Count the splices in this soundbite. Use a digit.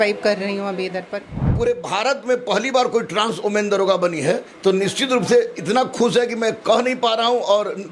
1